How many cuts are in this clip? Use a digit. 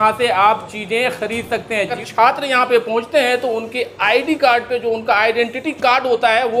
1